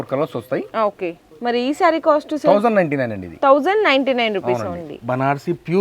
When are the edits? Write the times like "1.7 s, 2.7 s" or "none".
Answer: 1.3 s, 4.9 s